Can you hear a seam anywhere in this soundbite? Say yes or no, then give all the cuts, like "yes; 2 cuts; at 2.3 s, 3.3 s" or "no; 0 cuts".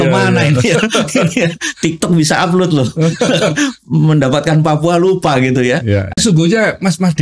yes; 1 cut; at 6.1 s